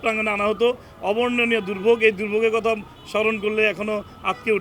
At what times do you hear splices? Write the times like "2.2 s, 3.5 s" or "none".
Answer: none